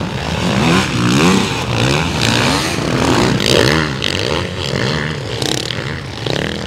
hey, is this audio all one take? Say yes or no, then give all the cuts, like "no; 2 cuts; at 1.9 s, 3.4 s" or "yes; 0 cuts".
no; 1 cut; at 3.4 s